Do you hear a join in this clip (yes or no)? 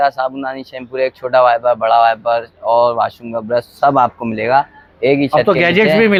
no